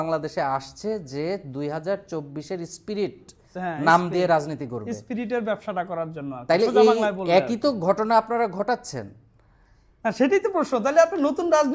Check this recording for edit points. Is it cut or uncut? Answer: uncut